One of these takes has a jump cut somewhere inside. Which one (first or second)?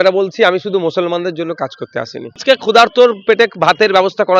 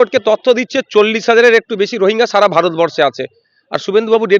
first